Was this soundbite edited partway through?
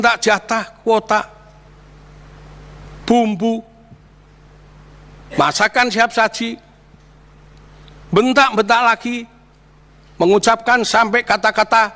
no; 0 cuts

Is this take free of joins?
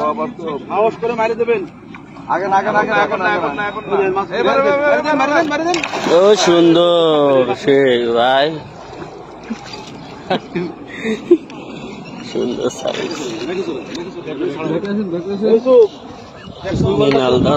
yes; 0 cuts

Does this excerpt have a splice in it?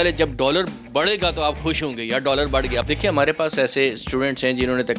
yes; 1 cut; at 2.9 s

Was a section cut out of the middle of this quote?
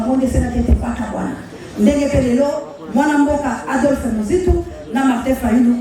no; 0 cuts

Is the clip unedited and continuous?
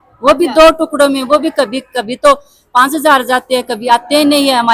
yes; 0 cuts

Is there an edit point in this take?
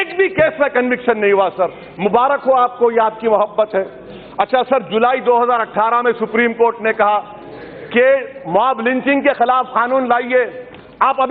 no; 0 cuts

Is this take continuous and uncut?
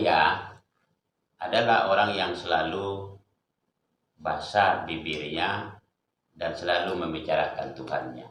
yes; 0 cuts

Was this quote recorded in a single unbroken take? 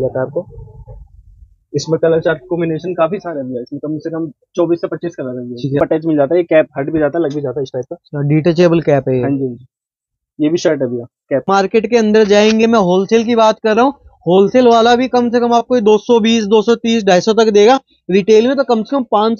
no; 2 cuts; at 5.8 s, 11.4 s

